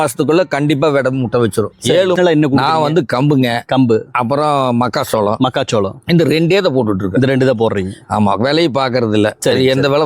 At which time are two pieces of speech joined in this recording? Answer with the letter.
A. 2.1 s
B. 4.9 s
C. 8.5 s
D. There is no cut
A